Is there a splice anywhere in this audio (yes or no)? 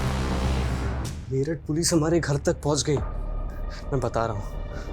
yes